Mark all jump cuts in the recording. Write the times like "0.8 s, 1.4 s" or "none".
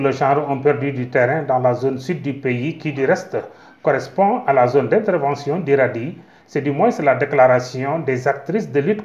none